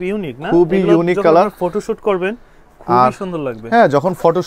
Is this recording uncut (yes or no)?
yes